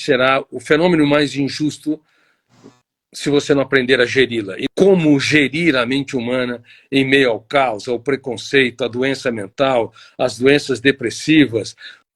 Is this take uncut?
no; 1 cut; at 4.6 s

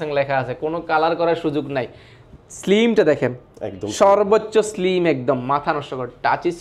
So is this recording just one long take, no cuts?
yes; 0 cuts

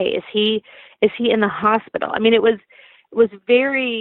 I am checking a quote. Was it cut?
no; 0 cuts

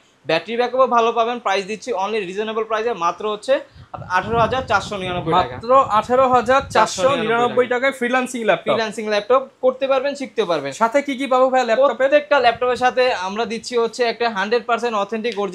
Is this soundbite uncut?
yes; 0 cuts

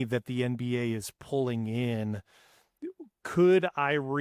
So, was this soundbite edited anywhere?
no; 0 cuts

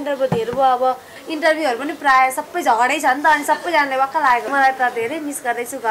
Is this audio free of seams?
no; 2 cuts; at 1.1 s, 4.5 s

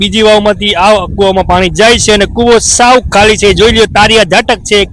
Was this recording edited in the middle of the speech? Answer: no; 0 cuts

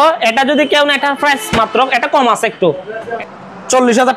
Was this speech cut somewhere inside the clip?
yes; 1 cut; at 3.1 s

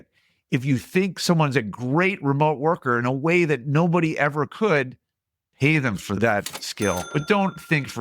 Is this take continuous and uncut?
no; 2 cuts; at 6.2 s, 7.0 s

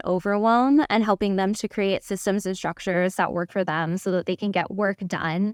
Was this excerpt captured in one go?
yes; 0 cuts

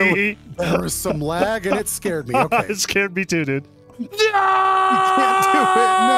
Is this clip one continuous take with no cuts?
no; 1 cut; at 4.0 s

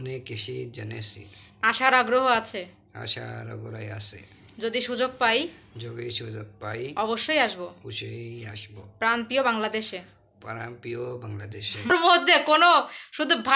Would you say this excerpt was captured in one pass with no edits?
no; 1 cut; at 11.9 s

